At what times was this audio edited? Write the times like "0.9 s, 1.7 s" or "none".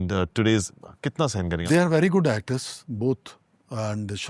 1.6 s